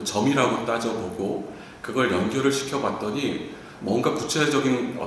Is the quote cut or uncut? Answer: uncut